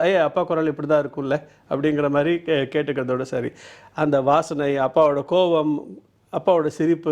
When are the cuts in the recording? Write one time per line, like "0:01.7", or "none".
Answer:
none